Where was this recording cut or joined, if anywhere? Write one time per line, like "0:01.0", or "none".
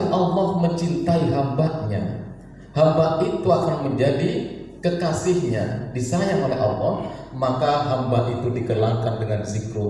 none